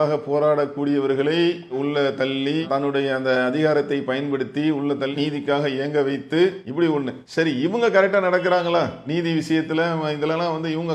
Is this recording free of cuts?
yes; 0 cuts

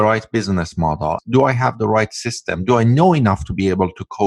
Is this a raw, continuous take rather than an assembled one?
no; 1 cut; at 1.2 s

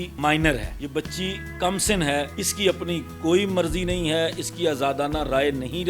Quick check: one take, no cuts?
no; 1 cut; at 2.4 s

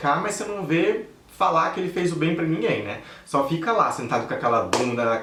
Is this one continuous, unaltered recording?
yes; 0 cuts

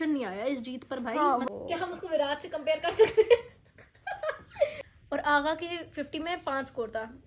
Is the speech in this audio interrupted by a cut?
yes; 2 cuts; at 1.5 s, 4.8 s

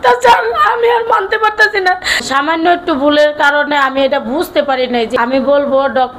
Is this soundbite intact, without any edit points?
no; 2 cuts; at 2.2 s, 5.1 s

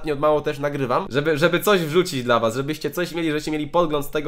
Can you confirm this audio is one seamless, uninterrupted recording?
no; 1 cut; at 1.0 s

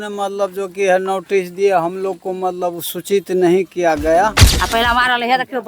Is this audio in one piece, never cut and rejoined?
no; 1 cut; at 4.5 s

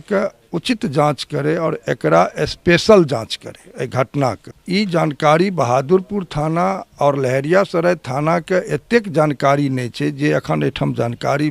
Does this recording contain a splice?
yes; 1 cut; at 4.5 s

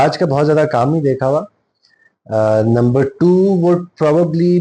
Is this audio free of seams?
yes; 0 cuts

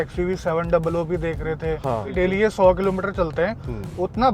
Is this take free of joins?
no; 1 cut; at 2.1 s

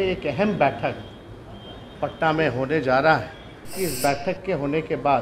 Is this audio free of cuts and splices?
no; 1 cut; at 3.7 s

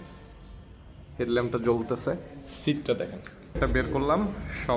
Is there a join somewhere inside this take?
yes; 1 cut; at 3.6 s

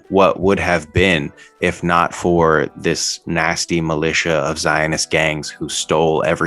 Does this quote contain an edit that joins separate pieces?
no; 0 cuts

